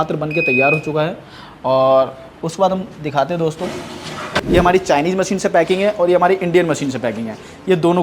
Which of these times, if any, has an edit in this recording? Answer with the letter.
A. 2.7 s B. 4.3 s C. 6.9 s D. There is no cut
B